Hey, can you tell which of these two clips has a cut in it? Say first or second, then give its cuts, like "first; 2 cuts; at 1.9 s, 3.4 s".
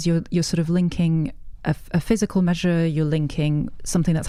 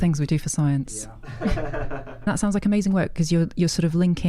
second; 1 cut; at 2.3 s